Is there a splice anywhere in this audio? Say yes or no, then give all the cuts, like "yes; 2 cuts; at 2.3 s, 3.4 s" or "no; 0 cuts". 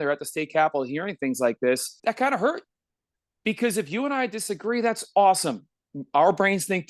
yes; 1 cut; at 1.9 s